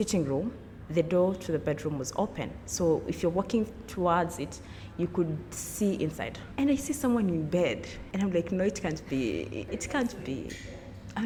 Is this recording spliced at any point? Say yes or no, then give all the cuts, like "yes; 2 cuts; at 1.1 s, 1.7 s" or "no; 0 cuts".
no; 0 cuts